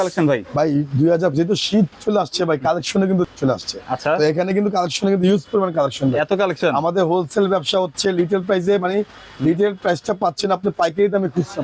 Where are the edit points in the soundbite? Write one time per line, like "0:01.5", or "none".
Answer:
0:01.9
0:03.3